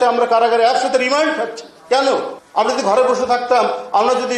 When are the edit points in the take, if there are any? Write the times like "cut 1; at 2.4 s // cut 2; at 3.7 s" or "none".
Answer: cut 1; at 2.4 s